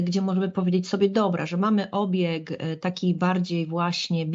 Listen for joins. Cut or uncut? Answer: uncut